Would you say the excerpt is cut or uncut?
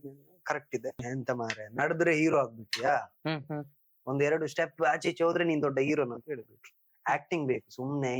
cut